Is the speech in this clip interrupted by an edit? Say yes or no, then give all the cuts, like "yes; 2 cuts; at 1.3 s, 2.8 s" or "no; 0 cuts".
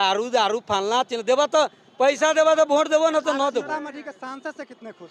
no; 0 cuts